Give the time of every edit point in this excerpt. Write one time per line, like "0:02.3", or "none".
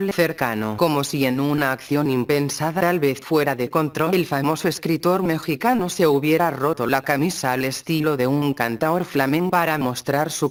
none